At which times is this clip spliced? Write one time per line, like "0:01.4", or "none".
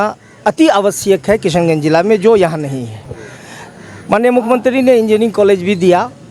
none

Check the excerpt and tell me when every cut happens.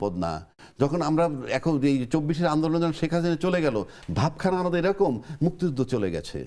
none

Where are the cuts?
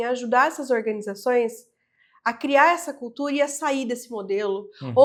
none

